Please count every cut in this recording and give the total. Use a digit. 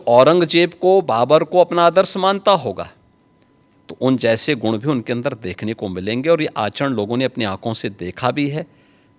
0